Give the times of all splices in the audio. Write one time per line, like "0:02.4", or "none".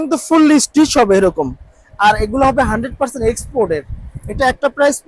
none